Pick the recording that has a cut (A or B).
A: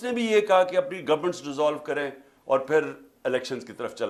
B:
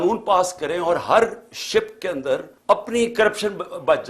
B